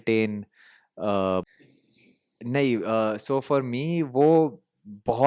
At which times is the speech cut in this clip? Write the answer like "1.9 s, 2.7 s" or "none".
1.4 s